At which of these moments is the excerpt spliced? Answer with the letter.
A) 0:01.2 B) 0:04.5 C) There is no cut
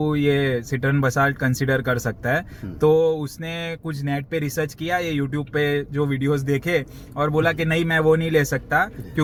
C